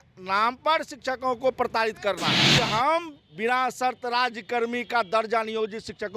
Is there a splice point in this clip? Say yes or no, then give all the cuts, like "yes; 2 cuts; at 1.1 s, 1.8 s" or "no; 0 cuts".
yes; 1 cut; at 2.4 s